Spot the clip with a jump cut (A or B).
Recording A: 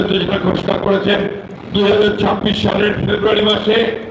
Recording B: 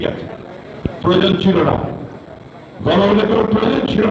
A